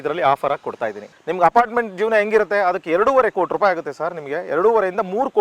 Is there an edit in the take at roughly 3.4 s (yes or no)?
no